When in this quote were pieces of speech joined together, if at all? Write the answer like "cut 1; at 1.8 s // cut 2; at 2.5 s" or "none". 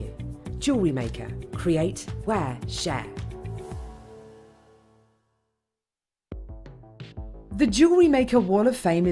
cut 1; at 6.1 s